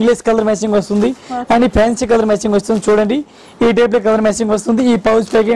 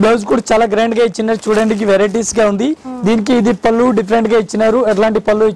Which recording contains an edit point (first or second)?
second